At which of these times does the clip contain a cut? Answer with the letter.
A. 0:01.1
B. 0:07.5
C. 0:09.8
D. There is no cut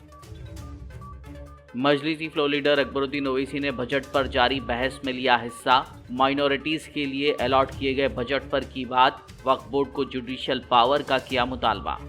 A